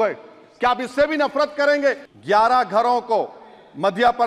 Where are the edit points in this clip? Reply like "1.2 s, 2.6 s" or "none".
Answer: 2.1 s